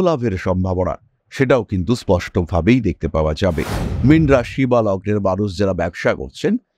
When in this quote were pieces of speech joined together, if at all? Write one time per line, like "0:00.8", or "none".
0:03.9